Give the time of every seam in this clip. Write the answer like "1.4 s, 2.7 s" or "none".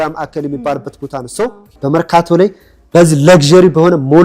1.8 s